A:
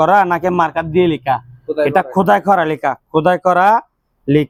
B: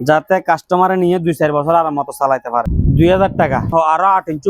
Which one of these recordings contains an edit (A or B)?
B